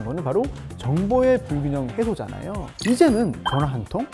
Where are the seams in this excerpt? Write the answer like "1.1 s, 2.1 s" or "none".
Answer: 2.7 s